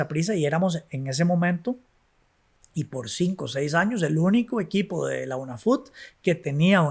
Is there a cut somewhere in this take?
no; 0 cuts

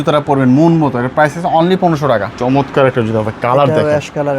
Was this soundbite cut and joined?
yes; 1 cut; at 2.3 s

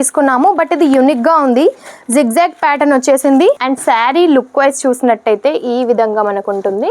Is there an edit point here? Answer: yes; 1 cut; at 3.6 s

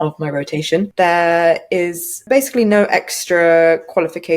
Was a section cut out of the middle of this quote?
yes; 2 cuts; at 0.9 s, 2.2 s

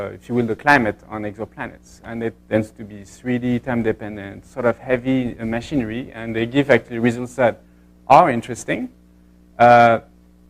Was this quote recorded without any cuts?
no; 1 cut; at 6.1 s

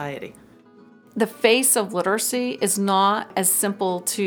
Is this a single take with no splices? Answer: no; 2 cuts; at 1.0 s, 3.3 s

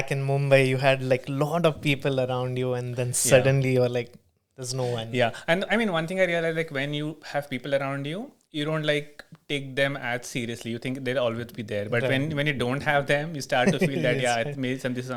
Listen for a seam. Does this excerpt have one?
no; 0 cuts

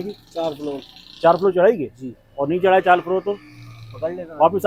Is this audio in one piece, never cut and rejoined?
yes; 0 cuts

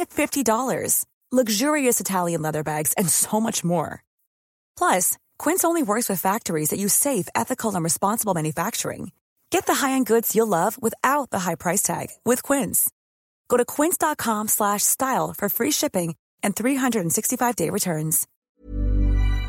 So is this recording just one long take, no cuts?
no; 1 cut; at 18.3 s

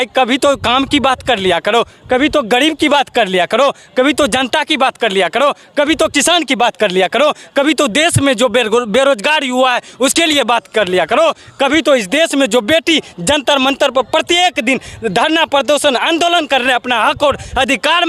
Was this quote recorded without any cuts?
yes; 0 cuts

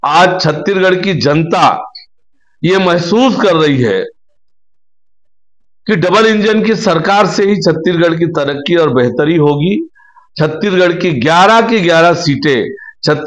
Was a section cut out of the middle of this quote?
no; 0 cuts

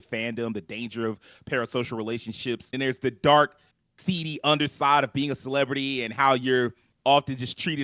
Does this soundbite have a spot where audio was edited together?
yes; 1 cut; at 2.7 s

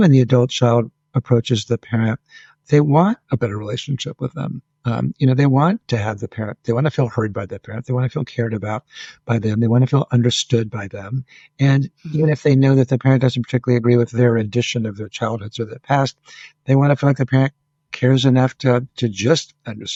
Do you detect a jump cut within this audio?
no; 0 cuts

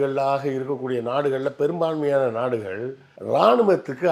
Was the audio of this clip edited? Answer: no; 0 cuts

